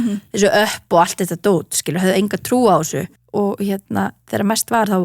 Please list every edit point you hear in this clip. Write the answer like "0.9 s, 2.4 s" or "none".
3.0 s